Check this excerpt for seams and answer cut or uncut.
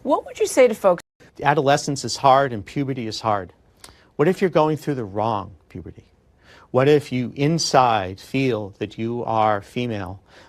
cut